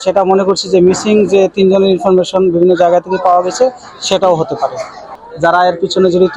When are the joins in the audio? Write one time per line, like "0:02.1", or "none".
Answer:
0:05.1